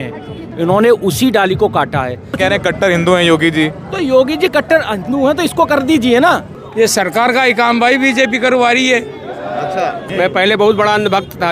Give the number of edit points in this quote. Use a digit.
3